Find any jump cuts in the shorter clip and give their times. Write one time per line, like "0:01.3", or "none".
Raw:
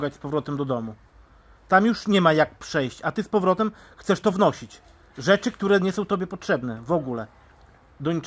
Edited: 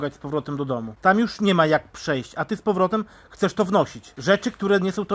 0:00.9
0:04.1